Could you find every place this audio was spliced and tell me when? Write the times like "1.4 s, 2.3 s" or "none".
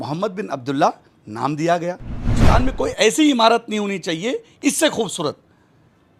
2.3 s